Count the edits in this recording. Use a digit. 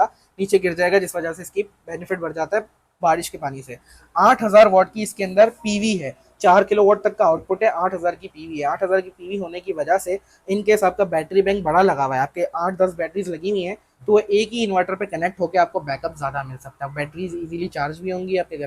0